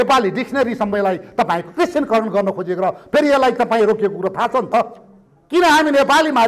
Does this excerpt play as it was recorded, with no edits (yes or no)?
yes